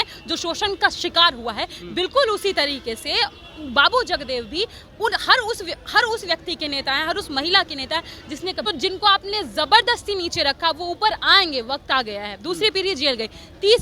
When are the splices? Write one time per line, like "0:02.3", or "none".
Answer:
0:08.7